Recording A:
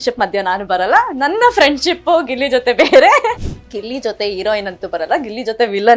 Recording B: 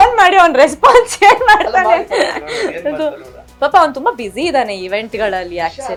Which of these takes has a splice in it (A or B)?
A